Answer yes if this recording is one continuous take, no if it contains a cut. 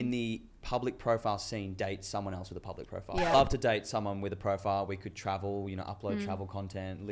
no